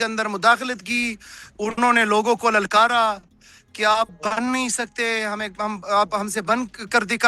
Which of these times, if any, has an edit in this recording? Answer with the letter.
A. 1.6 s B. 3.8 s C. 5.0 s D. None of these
D